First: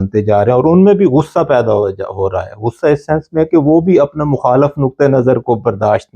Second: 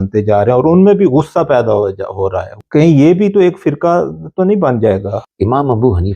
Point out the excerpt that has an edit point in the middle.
second; 2 cuts; at 2.6 s, 5.2 s

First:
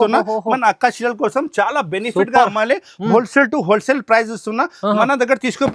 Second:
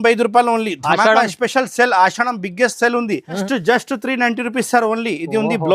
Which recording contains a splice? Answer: second; 1 cut; at 3.4 s

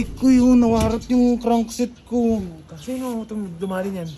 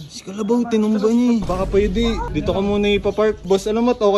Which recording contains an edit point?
second; 1 cut; at 1.5 s

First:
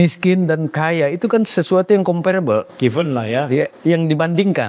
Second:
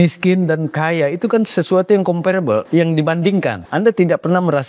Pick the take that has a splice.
second; 2 cuts; at 2.7 s, 3.6 s

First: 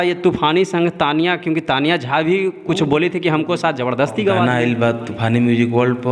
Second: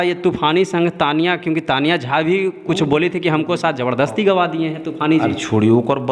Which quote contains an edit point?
first; 1 cut; at 4.4 s

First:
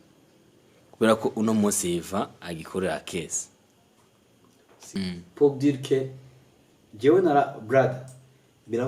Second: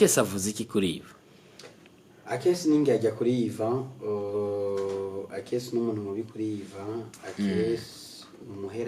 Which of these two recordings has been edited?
first; 1 cut; at 5.0 s

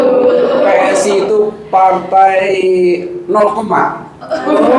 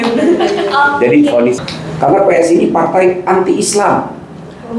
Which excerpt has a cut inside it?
second; 1 cut; at 1.6 s

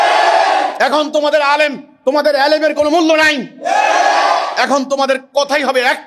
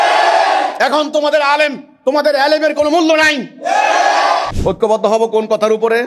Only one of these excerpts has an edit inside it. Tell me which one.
second; 1 cut; at 4.5 s

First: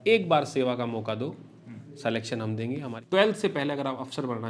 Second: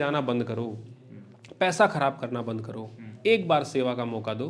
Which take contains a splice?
first; 1 cut; at 2.9 s

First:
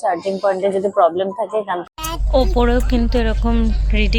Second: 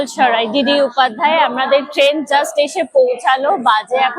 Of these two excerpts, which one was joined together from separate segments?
first; 1 cut; at 1.9 s

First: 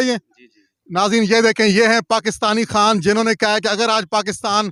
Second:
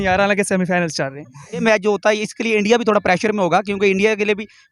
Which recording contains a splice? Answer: second; 1 cut; at 1.6 s

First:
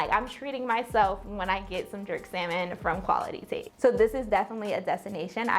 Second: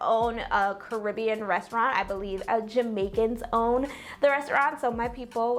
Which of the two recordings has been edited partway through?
first; 1 cut; at 3.4 s

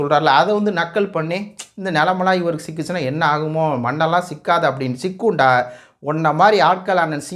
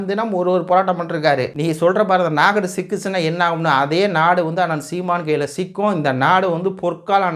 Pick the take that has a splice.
second; 1 cut; at 1.5 s

